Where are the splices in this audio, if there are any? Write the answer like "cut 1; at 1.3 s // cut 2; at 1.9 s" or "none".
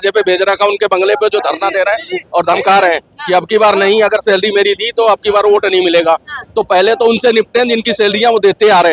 none